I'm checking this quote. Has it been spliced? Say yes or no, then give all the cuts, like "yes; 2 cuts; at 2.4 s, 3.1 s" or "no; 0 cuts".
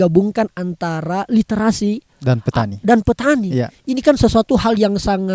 no; 0 cuts